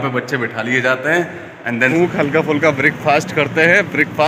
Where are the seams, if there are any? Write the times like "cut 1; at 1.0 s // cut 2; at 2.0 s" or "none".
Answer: cut 1; at 1.9 s